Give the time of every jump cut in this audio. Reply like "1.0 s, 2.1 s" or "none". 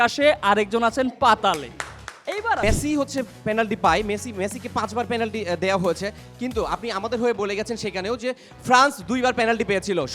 2.6 s